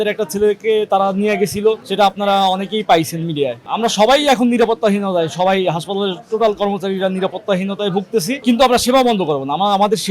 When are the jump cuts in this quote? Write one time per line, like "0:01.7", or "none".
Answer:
0:01.8
0:03.6
0:08.4

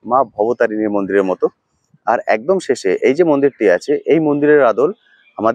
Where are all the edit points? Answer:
none

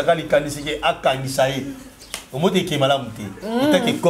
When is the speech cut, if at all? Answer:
none

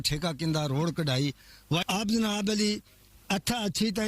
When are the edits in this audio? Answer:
0:01.8

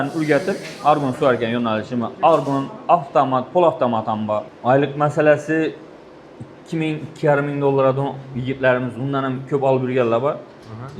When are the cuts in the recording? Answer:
0:04.5

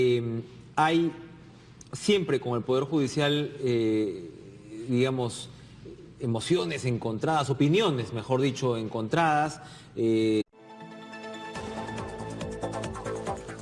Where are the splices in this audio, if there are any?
none

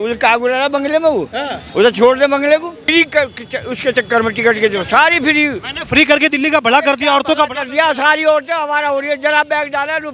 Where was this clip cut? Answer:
0:02.9

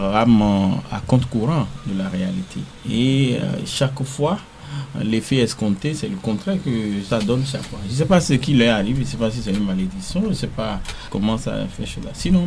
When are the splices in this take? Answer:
none

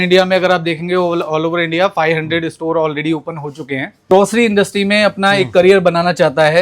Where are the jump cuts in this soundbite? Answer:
0:03.9

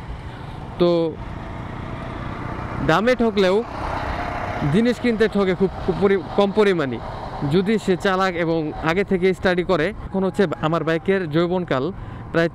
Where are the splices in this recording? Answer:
0:10.1

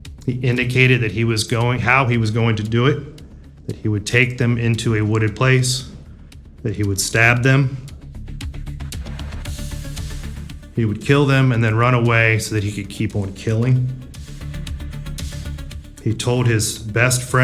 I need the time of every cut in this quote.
none

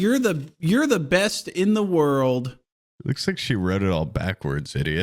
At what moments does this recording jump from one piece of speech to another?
0:03.2

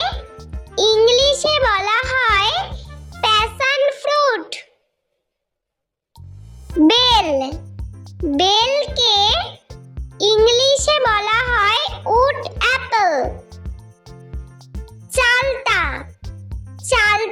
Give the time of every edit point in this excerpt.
none

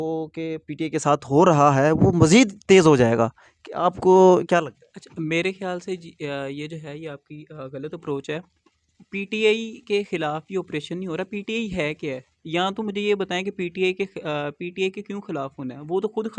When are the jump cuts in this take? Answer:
none

